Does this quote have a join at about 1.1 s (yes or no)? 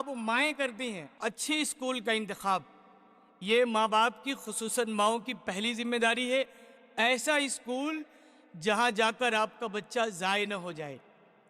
yes